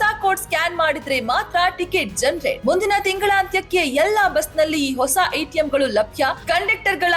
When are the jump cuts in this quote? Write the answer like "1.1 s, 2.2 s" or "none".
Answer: none